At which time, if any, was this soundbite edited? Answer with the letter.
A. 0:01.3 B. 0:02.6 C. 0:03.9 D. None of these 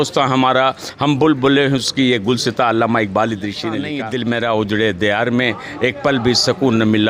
C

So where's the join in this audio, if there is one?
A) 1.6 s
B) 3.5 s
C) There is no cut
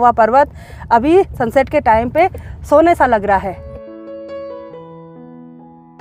C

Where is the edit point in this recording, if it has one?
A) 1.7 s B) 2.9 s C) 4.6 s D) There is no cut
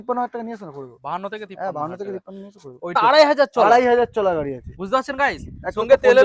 B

